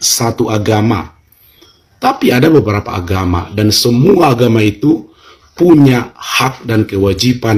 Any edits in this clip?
no; 0 cuts

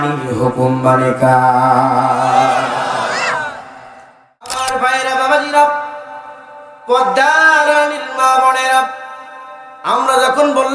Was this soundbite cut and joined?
yes; 1 cut; at 4.6 s

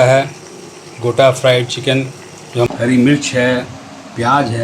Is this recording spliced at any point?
yes; 1 cut; at 2.7 s

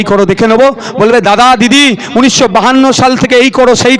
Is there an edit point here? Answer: no; 0 cuts

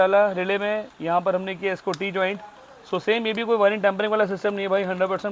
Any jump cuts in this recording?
no; 0 cuts

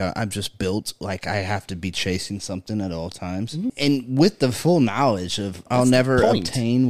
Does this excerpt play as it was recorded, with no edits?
no; 2 cuts; at 3.7 s, 5.6 s

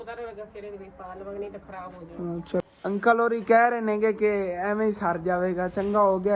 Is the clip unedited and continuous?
no; 1 cut; at 2.6 s

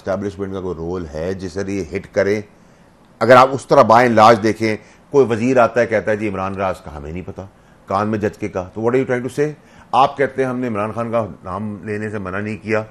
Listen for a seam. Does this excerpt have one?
no; 0 cuts

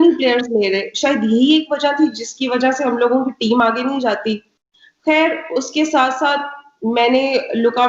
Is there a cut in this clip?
no; 0 cuts

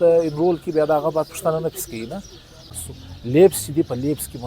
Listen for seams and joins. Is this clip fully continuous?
no; 1 cut; at 2.7 s

